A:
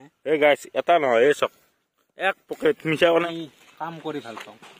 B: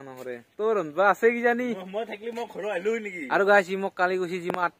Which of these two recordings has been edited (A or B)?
A